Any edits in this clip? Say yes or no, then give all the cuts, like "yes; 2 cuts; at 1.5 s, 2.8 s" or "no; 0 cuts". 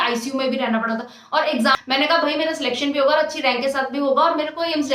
yes; 1 cut; at 1.8 s